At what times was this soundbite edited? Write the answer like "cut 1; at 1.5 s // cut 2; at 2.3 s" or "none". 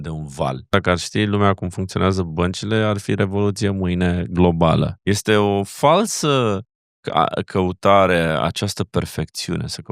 cut 1; at 0.7 s // cut 2; at 5.0 s